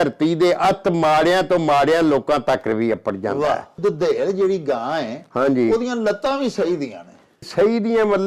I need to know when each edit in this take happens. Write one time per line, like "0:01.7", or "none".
0:03.8
0:07.5